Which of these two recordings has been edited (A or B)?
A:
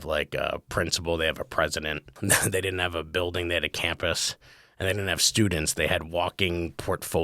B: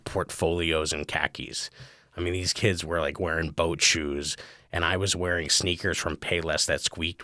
A